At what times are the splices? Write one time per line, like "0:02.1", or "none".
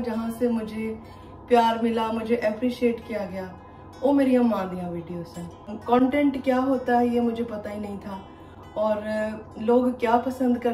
0:05.8